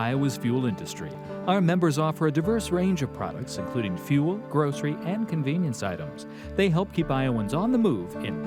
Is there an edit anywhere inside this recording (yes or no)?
no